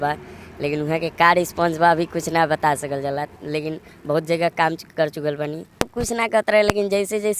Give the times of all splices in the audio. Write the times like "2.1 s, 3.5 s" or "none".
5.8 s